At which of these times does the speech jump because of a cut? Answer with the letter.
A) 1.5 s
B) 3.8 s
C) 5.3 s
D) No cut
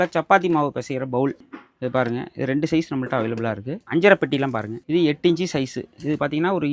B